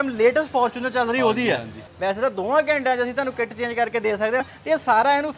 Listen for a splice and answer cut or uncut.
cut